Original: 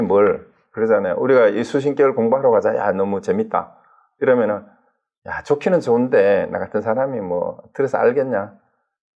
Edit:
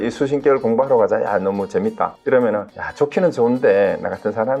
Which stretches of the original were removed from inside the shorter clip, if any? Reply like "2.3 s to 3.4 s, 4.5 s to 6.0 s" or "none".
3.7 s to 4.1 s, 4.7 s to 5.3 s